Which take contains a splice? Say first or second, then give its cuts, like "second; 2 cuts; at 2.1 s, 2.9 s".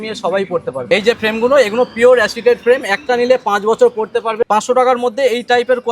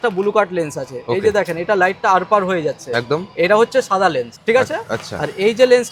first; 2 cuts; at 0.8 s, 4.4 s